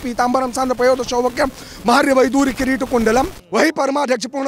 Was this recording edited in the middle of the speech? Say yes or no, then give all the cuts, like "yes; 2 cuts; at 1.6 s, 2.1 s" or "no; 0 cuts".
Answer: yes; 1 cut; at 3.4 s